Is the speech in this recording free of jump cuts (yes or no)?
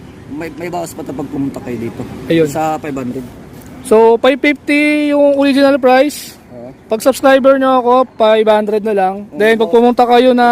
yes